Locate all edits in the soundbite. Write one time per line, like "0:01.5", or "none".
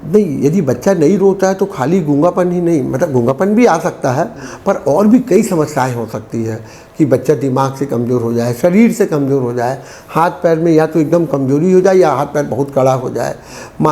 none